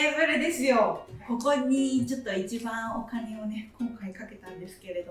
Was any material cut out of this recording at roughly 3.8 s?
no; 1 cut; at 1.1 s

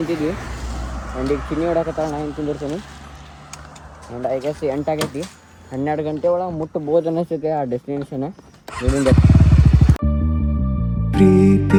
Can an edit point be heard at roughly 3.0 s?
no; 0 cuts

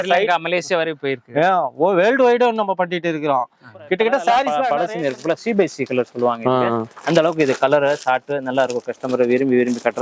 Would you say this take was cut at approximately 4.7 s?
yes; 1 cut; at 4.7 s

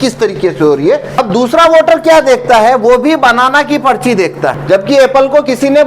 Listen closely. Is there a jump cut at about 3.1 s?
no; 2 cuts; at 1.2 s, 4.6 s

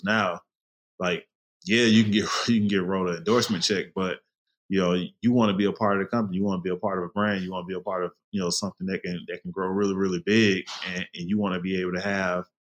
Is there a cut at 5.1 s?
no; 0 cuts

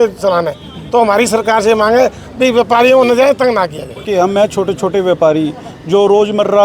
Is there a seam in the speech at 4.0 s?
yes; 1 cut; at 4.0 s

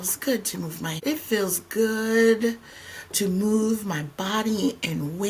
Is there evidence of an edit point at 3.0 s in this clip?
no; 1 cut; at 1.0 s

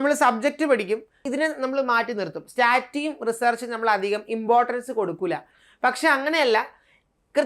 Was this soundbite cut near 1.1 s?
yes; 1 cut; at 1.1 s

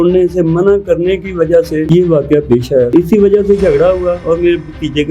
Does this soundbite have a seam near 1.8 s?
yes; 2 cuts; at 1.8 s, 2.9 s

